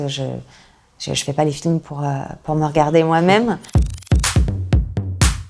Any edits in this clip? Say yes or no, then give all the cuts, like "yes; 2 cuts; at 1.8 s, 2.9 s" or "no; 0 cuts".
yes; 1 cut; at 3.7 s